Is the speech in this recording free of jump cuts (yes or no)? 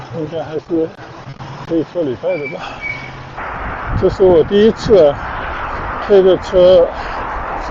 no